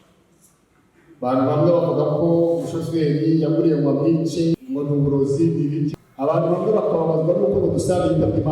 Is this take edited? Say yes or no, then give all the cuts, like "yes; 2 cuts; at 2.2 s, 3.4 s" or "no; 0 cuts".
yes; 2 cuts; at 4.6 s, 5.9 s